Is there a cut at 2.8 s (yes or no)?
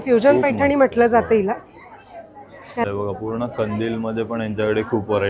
yes